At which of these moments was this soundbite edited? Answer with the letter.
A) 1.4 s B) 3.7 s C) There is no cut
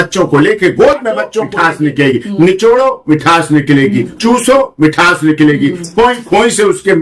A